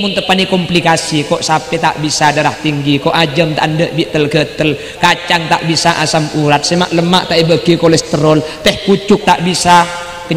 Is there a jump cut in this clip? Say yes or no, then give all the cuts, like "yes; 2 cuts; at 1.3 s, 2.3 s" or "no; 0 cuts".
no; 0 cuts